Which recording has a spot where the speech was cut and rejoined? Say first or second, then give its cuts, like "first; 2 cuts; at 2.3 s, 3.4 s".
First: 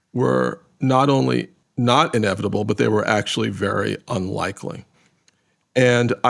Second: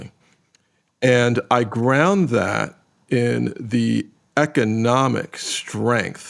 first; 1 cut; at 1.6 s